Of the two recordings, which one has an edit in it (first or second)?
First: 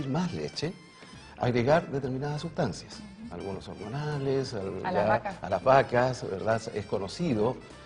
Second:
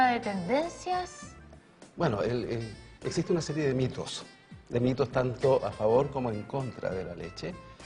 second